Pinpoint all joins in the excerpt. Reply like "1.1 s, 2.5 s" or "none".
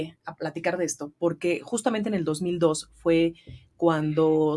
none